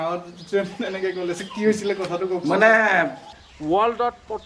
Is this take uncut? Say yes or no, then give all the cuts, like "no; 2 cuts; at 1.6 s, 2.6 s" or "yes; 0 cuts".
no; 1 cut; at 3.4 s